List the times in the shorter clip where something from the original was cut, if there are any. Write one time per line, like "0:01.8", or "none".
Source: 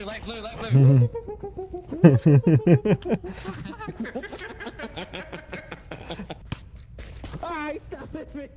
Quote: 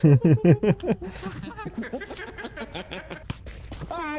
0:03.2